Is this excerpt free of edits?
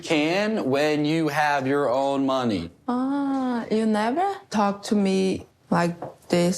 no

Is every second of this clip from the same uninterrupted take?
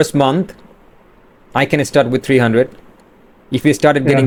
yes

